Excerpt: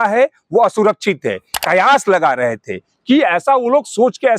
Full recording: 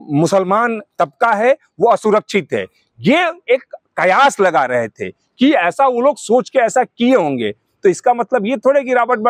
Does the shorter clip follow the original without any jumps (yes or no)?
no